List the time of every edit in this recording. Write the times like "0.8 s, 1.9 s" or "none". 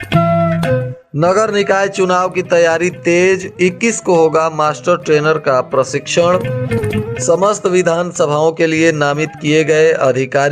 0.9 s